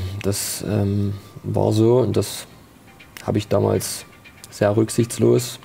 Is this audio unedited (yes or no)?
yes